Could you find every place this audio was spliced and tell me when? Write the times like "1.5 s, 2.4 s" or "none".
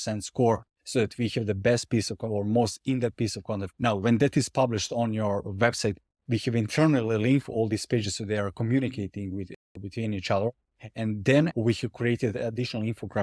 3.7 s, 11.5 s